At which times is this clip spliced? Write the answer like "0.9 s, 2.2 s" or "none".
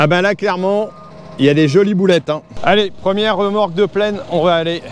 2.5 s